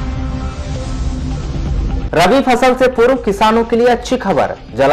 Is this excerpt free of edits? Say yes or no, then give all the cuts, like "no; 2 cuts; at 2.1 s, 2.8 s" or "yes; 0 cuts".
no; 1 cut; at 1.7 s